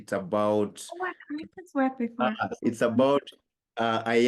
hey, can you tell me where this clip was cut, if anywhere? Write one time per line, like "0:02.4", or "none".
0:02.6